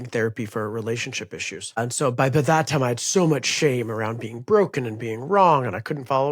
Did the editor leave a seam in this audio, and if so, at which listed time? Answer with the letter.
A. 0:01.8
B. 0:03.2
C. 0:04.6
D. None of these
A